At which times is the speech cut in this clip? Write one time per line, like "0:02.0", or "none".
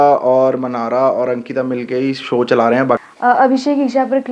0:03.1

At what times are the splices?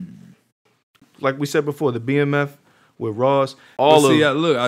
0:01.1
0:03.7

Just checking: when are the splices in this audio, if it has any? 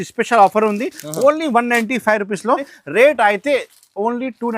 0:02.7

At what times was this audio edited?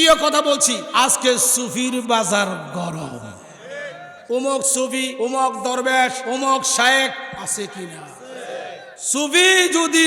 0:00.8
0:04.1
0:05.1
0:06.2
0:08.9

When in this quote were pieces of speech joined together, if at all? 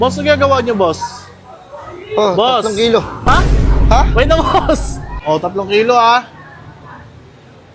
0:05.0

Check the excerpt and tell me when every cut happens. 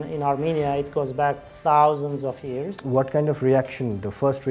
0:02.8

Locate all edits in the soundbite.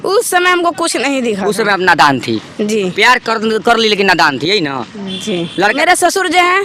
0:05.8

